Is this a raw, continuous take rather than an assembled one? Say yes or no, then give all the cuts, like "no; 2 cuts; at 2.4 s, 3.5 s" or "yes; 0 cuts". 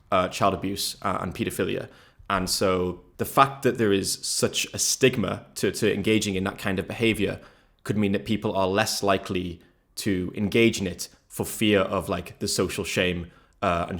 no; 1 cut; at 3.0 s